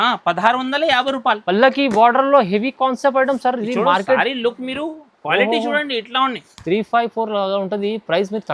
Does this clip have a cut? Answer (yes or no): no